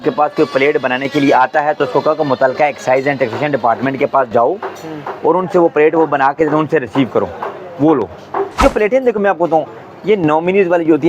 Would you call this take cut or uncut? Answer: cut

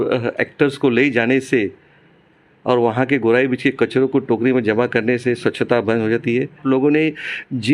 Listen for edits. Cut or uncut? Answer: cut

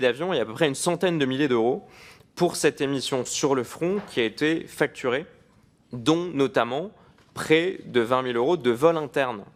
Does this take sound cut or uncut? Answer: uncut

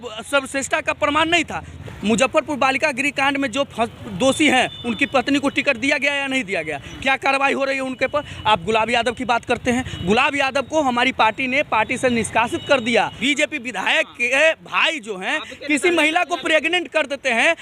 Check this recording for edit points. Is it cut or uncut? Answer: cut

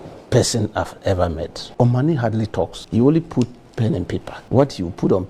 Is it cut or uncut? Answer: cut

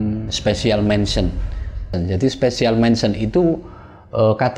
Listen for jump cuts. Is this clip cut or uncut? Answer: cut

